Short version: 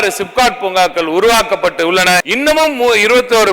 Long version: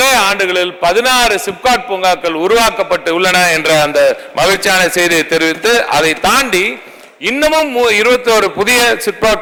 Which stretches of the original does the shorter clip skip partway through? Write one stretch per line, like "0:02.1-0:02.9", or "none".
0:03.5-0:07.2